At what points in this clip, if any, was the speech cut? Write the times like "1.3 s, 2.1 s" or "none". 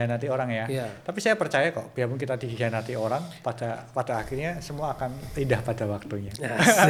none